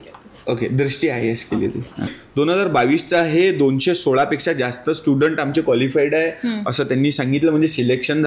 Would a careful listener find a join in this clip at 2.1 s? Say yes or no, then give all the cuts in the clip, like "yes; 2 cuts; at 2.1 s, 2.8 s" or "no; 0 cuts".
yes; 1 cut; at 2.1 s